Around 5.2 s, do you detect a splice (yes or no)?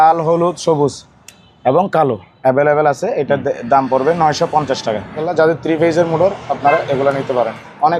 yes